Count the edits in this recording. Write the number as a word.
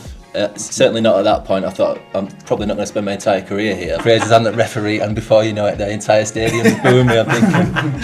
one